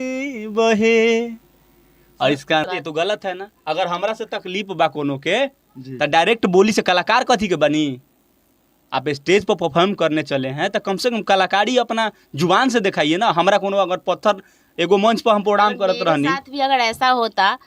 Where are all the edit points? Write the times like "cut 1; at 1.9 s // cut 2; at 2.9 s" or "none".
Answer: cut 1; at 2.6 s